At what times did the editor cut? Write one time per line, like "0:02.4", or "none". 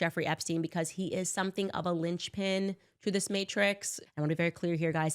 0:04.0